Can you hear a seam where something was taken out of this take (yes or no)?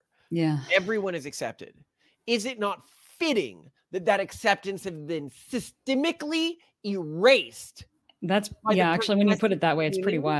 no